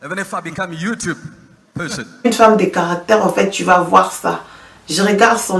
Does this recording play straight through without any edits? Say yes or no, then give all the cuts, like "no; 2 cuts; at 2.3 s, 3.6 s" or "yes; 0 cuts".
no; 1 cut; at 2.2 s